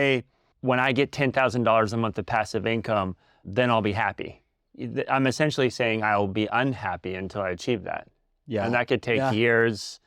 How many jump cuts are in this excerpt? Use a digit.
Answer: 0